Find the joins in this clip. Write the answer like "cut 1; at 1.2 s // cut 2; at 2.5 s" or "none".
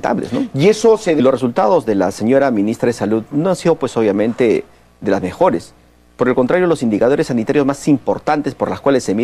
none